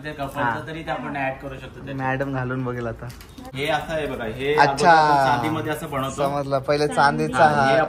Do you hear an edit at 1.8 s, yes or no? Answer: no